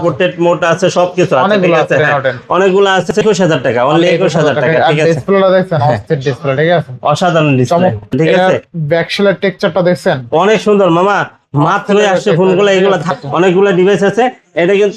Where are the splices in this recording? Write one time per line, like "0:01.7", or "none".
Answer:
0:03.1
0:08.1
0:13.1